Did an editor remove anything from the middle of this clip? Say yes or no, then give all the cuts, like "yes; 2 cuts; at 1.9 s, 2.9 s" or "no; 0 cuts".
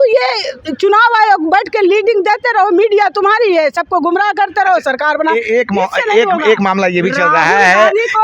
no; 0 cuts